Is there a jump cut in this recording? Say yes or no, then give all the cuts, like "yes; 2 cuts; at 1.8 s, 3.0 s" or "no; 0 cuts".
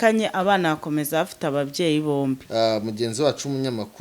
yes; 1 cut; at 2.4 s